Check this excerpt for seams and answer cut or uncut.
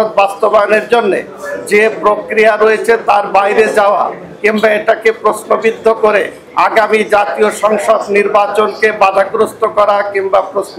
uncut